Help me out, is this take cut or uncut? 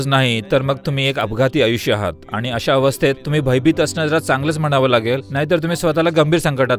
cut